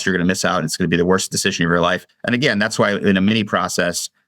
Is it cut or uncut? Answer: cut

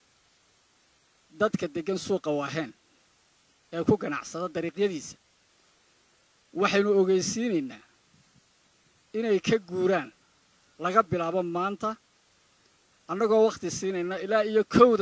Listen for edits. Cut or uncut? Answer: uncut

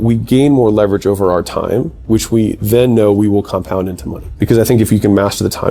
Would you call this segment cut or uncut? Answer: uncut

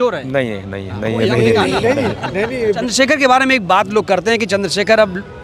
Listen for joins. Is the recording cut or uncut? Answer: cut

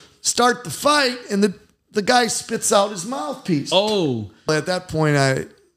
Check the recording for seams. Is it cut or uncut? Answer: cut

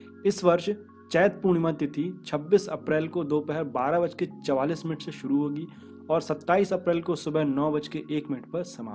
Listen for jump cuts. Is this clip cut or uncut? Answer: uncut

